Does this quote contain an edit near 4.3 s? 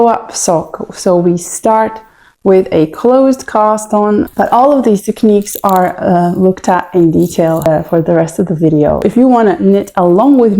yes; 2 cuts; at 4.3 s, 9.0 s

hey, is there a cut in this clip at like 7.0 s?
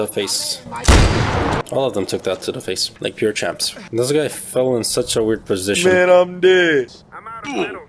yes; 2 cuts; at 3.8 s, 7.0 s

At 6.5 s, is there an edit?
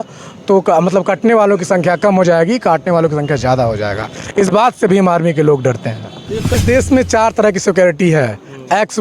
yes; 1 cut; at 6.5 s

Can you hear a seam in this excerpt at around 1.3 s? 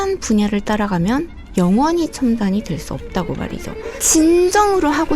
no; 1 cut; at 4.0 s

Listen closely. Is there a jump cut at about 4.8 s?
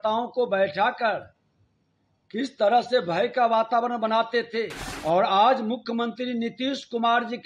yes; 1 cut; at 4.8 s

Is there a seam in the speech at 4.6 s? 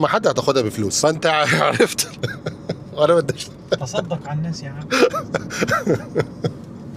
no; 0 cuts

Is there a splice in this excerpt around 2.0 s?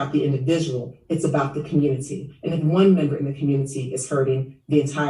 no; 0 cuts

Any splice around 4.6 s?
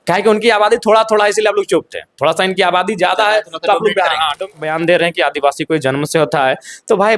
yes; 1 cut; at 4.6 s

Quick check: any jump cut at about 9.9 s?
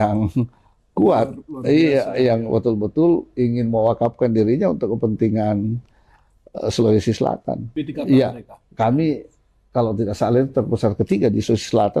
no; 1 cut; at 7.7 s

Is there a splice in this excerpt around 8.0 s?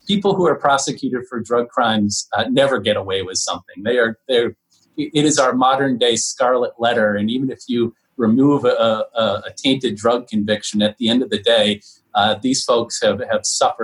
no; 0 cuts

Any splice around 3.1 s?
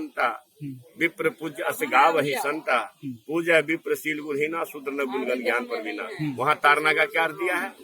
no; 0 cuts

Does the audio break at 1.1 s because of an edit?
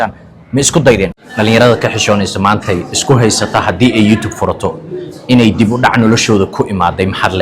yes; 1 cut; at 1.1 s

